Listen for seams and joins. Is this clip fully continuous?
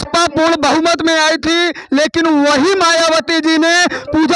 yes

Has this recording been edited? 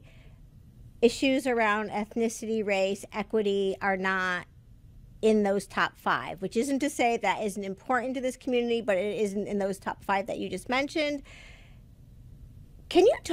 yes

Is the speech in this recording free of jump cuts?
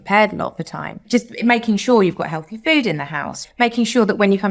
no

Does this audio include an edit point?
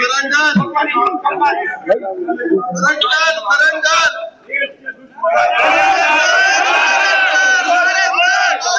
yes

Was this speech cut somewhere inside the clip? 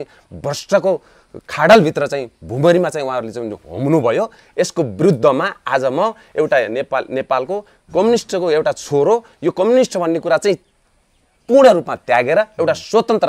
no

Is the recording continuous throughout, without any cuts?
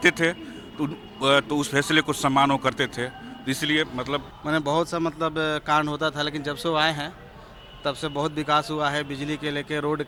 yes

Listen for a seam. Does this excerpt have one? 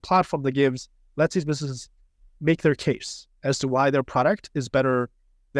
no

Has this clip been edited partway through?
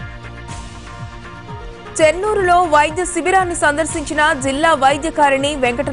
yes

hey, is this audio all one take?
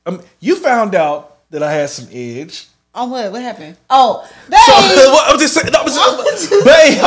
yes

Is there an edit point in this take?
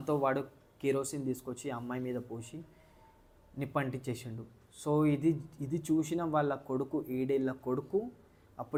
no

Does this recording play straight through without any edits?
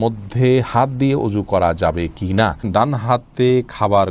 no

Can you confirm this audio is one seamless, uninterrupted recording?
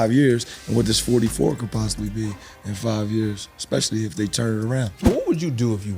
no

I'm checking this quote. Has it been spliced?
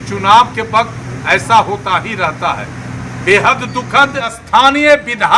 yes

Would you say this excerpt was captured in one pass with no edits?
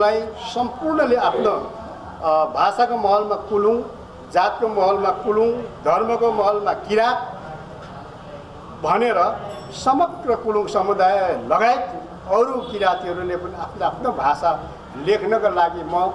yes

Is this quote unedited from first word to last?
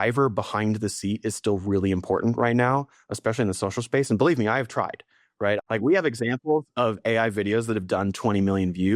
no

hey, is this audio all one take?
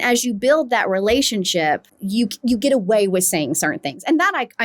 yes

